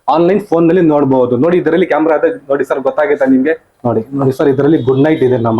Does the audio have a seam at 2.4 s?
no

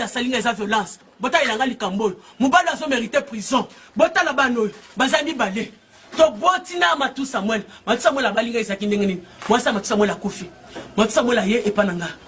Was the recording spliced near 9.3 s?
no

